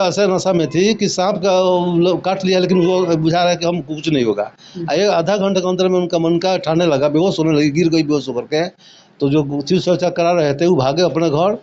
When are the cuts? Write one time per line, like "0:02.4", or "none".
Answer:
none

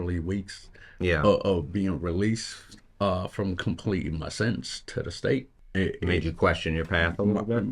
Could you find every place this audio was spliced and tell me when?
0:05.6

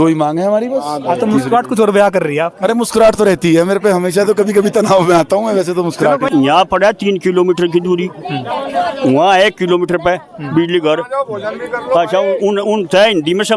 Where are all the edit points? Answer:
0:06.3

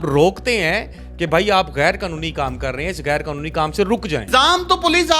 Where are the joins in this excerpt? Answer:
0:04.2

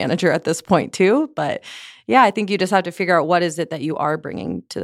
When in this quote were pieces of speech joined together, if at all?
none

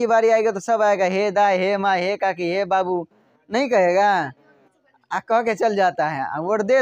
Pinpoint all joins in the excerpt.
none

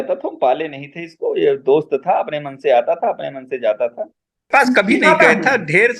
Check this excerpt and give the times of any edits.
0:04.5

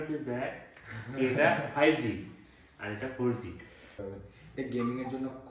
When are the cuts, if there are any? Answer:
0:03.8

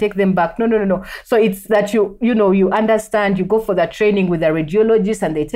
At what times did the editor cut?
none

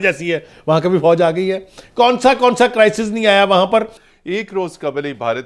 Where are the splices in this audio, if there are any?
0:03.9

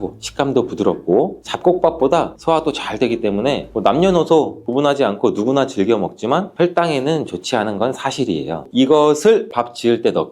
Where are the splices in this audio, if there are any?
0:08.6

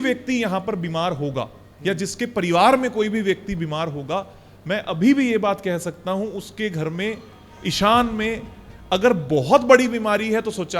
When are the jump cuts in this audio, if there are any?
none

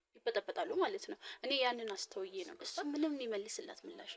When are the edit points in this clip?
0:02.6

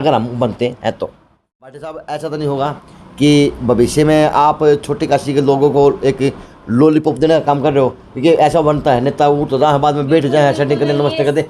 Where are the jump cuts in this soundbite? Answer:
0:01.9

